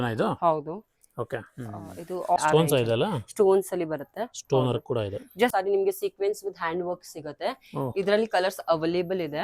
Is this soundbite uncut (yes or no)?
no